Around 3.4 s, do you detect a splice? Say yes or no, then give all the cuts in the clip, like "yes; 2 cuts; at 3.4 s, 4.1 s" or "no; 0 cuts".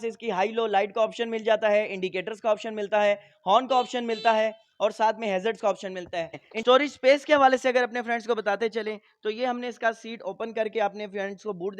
no; 1 cut; at 6.5 s